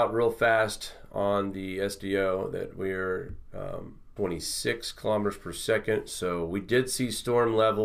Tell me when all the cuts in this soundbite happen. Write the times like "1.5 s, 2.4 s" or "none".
none

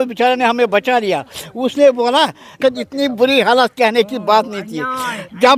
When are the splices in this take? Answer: 2.6 s

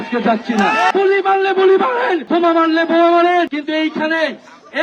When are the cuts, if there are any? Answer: 0.9 s, 2.2 s, 3.5 s

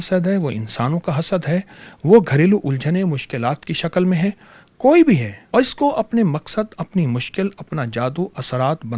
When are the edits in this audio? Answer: 5.4 s

